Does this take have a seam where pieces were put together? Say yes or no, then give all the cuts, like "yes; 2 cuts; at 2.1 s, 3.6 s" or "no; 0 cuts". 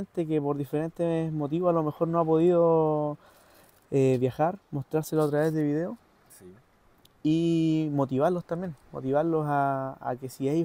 no; 0 cuts